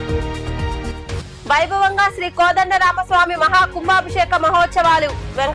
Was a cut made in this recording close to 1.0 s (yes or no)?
no